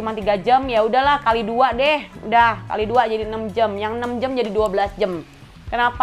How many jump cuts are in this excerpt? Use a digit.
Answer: 0